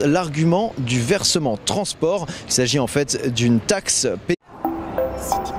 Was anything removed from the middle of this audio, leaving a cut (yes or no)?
no